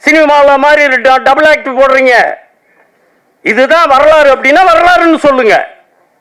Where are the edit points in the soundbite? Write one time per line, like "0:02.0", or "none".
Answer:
none

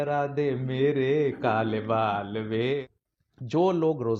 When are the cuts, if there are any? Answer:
0:02.8

